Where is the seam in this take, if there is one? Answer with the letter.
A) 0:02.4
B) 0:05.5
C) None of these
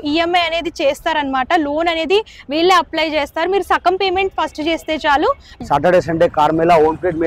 B